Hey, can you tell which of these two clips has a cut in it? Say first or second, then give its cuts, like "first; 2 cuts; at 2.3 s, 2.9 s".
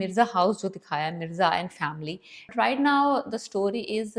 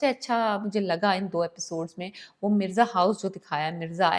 first; 1 cut; at 2.5 s